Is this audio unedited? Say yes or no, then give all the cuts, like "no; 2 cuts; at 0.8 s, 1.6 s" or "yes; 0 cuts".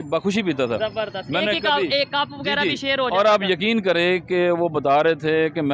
yes; 0 cuts